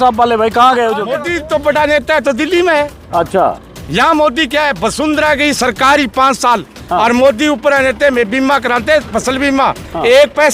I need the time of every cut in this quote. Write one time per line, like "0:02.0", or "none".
0:01.2